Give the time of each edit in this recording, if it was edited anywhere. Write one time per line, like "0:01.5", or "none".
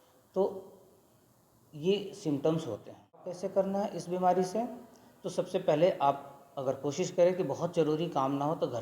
0:03.4